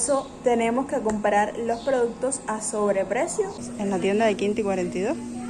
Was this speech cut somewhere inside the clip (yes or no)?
yes